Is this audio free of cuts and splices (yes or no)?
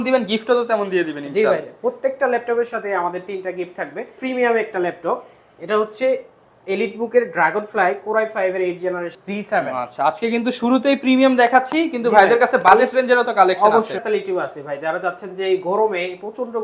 no